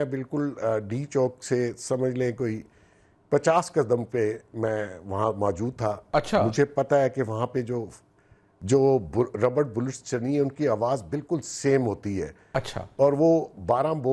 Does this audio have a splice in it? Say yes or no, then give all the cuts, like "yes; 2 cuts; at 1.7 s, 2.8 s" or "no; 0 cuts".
no; 0 cuts